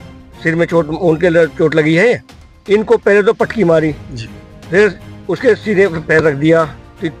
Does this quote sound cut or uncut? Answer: uncut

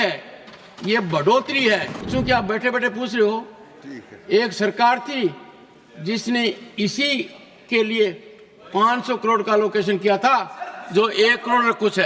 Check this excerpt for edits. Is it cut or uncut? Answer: cut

